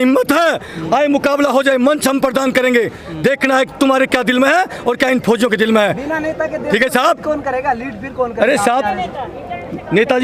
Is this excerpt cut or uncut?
uncut